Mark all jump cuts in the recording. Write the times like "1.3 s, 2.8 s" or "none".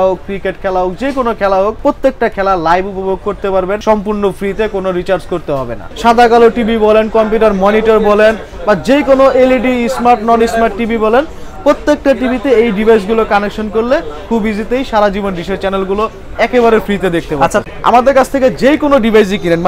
1.8 s, 3.8 s, 5.8 s, 17.6 s

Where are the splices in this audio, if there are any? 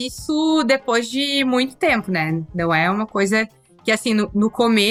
none

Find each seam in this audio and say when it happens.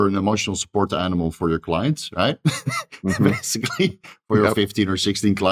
none

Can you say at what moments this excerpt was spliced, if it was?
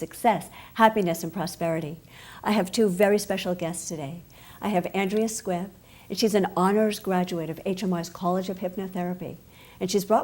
5.0 s

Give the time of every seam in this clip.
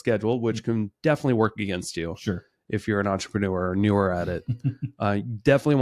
none

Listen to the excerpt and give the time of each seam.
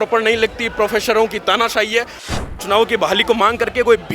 2.2 s

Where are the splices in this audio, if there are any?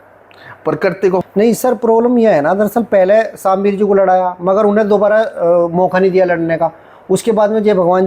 1.2 s

